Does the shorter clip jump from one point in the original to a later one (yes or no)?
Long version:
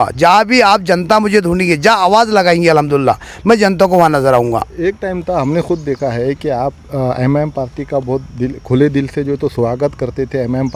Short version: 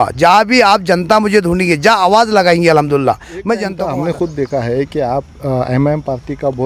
yes